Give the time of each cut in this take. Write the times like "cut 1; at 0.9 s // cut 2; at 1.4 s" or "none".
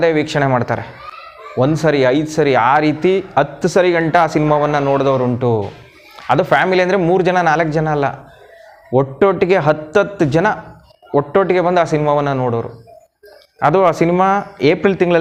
none